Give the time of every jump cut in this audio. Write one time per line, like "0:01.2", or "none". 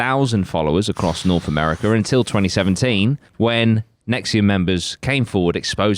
0:03.2